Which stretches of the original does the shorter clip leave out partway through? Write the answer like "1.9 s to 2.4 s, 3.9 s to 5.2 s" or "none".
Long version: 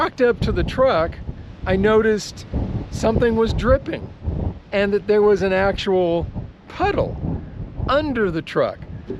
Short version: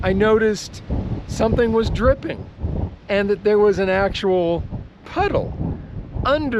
none